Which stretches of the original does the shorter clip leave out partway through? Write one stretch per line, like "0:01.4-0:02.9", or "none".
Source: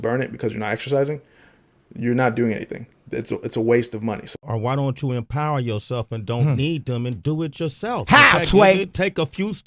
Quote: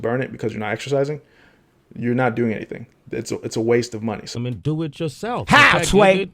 0:04.3-0:06.9